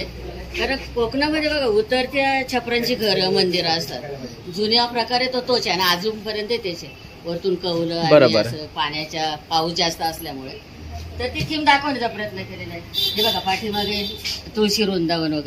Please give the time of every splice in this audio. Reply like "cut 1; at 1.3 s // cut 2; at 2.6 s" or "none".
none

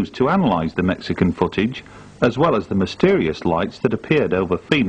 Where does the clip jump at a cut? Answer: cut 1; at 1.3 s

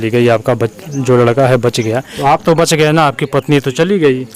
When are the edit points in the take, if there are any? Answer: cut 1; at 2.1 s

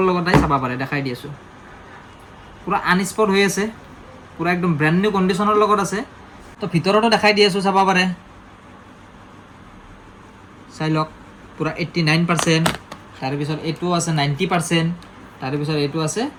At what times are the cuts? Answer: none

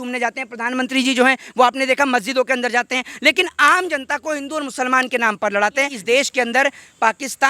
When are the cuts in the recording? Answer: cut 1; at 6.0 s

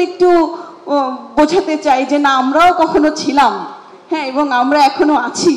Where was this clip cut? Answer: none

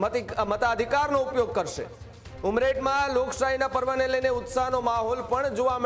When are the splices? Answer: none

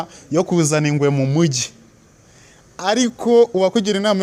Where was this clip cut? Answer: none

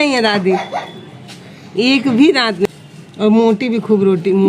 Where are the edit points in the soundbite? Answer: cut 1; at 2.7 s

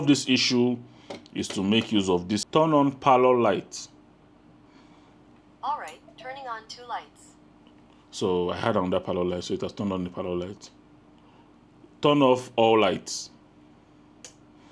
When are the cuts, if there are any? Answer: cut 1; at 2.4 s

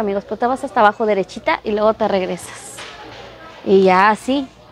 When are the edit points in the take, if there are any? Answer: none

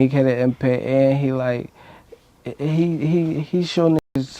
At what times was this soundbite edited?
none

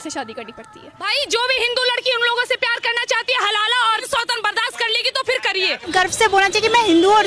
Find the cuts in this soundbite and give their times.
cut 1; at 1.1 s // cut 2; at 4.0 s // cut 3; at 5.9 s

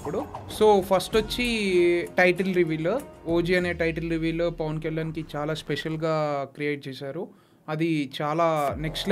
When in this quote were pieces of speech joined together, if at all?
none

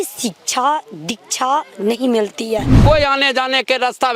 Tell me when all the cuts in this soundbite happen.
cut 1; at 2.8 s

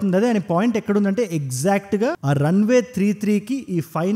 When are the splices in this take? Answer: none

